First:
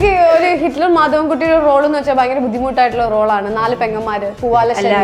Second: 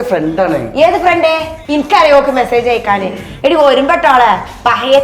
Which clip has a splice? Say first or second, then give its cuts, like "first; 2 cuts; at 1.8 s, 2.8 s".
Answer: second; 1 cut; at 1.5 s